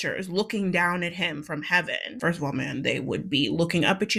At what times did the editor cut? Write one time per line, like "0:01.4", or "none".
none